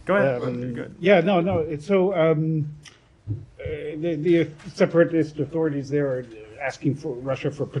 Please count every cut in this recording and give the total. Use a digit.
2